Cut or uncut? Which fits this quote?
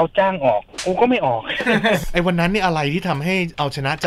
cut